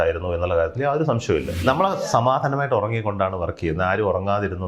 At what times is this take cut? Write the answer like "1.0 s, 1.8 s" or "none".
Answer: 1.6 s